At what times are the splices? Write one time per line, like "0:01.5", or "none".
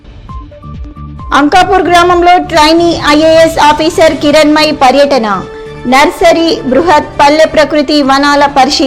0:01.1